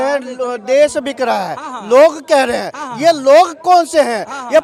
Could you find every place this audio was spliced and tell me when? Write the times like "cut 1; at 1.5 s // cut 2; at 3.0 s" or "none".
none